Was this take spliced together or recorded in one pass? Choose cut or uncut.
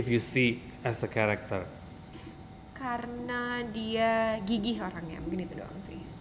cut